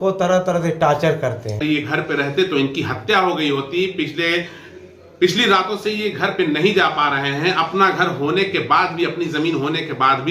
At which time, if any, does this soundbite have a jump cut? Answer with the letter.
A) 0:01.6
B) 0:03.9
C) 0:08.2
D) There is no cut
A